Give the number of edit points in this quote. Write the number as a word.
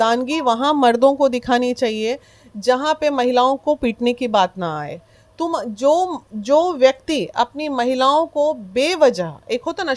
zero